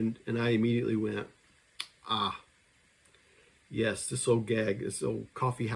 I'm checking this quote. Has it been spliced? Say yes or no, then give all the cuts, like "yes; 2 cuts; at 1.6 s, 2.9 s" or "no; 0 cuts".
no; 0 cuts